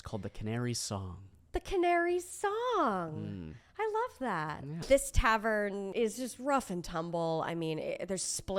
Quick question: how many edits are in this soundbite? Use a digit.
2